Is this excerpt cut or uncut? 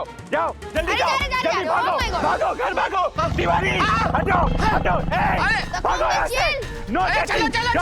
uncut